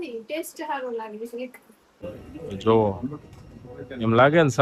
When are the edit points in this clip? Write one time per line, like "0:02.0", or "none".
0:02.2